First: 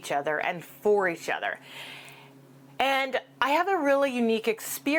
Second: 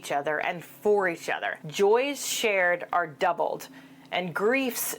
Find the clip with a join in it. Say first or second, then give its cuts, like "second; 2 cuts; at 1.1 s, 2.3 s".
second; 1 cut; at 1.6 s